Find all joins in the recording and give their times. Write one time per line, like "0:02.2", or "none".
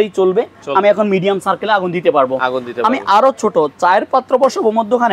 none